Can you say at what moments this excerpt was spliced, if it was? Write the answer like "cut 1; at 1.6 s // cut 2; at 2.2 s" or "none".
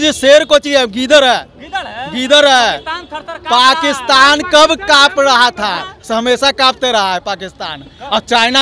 none